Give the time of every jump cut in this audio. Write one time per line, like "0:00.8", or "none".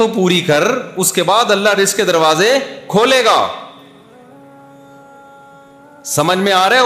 none